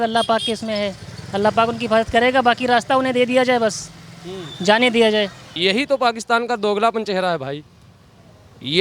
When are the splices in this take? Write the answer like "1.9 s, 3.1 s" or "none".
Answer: 5.4 s